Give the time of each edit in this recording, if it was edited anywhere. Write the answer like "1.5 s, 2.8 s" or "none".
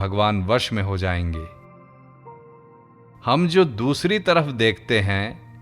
1.5 s, 3.0 s